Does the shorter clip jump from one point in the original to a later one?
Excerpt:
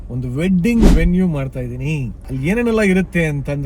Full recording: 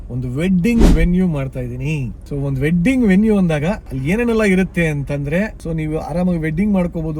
yes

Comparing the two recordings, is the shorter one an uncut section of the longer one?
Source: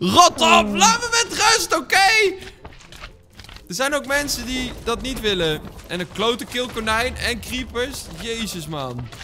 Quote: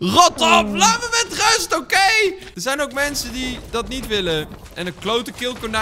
no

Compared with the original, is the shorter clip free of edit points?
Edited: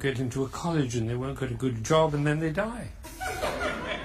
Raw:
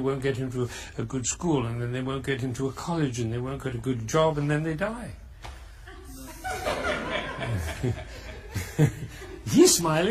no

